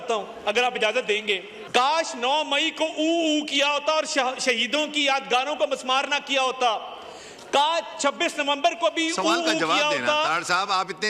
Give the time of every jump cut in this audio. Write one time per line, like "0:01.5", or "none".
0:01.5